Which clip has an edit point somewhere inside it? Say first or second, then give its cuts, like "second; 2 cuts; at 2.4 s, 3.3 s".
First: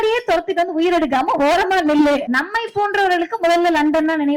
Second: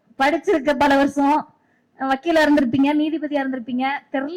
first; 1 cut; at 2.3 s